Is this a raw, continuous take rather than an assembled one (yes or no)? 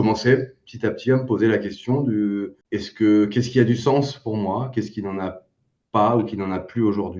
no